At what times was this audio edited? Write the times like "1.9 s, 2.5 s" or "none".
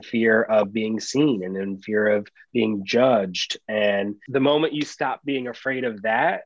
4.2 s